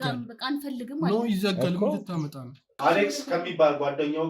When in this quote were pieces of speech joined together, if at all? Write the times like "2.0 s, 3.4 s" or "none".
2.7 s